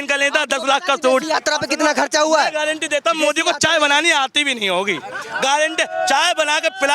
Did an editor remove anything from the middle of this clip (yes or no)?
no